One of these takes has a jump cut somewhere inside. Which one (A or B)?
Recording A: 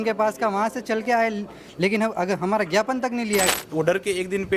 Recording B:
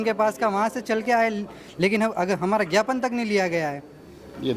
A